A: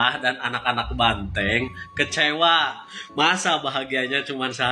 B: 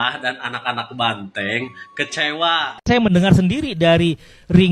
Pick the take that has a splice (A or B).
B